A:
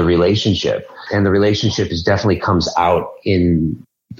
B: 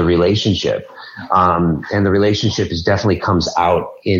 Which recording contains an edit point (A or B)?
A